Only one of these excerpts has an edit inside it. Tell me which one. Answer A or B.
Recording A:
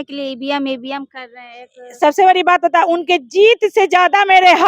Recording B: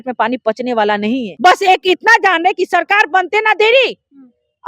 B